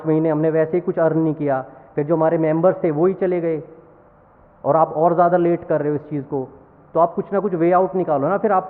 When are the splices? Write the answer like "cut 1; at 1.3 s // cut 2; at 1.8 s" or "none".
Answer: none